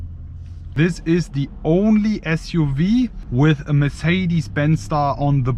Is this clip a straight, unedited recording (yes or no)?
no